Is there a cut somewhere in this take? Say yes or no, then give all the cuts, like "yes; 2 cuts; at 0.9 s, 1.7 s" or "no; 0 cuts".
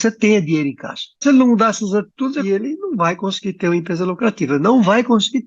yes; 2 cuts; at 1.2 s, 2.4 s